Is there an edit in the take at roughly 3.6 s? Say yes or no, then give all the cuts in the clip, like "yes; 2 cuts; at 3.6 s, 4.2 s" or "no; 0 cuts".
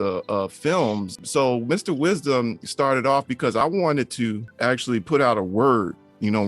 yes; 3 cuts; at 1.2 s, 3.6 s, 4.5 s